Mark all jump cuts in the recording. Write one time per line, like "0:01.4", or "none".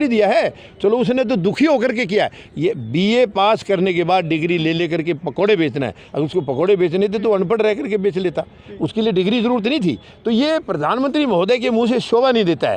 none